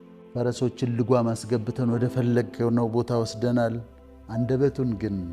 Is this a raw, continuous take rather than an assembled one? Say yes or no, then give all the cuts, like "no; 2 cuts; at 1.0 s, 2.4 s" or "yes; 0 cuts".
yes; 0 cuts